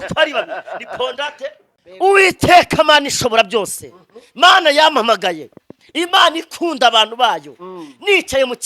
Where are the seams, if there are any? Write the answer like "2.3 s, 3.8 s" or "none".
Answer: 1.7 s